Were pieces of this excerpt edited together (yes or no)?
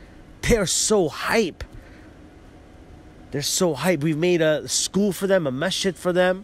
no